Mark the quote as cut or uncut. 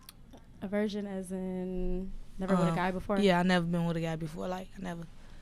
uncut